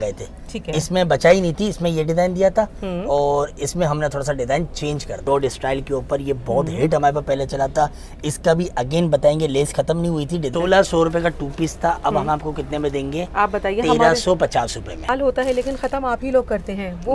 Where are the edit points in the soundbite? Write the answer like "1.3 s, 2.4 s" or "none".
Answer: 5.2 s, 10.5 s, 14.9 s